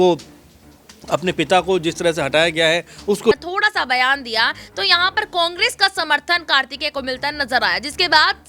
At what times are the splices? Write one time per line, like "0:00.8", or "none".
0:03.3